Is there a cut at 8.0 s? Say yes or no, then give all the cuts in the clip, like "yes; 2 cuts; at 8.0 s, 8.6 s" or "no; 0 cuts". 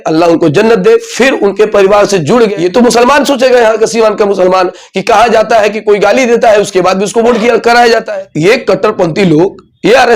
yes; 2 cuts; at 2.5 s, 8.0 s